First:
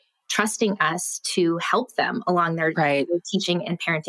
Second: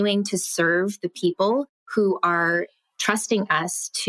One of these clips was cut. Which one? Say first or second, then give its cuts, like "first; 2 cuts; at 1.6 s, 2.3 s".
second; 1 cut; at 1.8 s